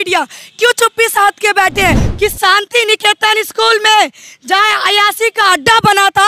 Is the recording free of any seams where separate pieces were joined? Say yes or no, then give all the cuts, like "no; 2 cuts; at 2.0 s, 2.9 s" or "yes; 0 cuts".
no; 1 cut; at 2.1 s